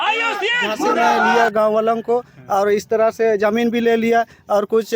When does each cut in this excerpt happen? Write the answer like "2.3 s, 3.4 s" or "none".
1.3 s